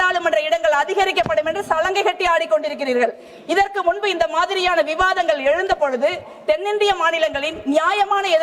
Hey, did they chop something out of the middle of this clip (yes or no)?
no